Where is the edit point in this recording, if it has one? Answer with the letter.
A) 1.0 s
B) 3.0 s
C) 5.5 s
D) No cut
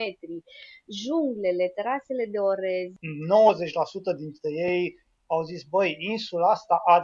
B